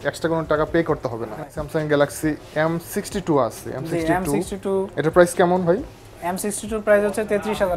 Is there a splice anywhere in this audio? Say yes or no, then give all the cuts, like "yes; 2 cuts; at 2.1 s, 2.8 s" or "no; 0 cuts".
no; 0 cuts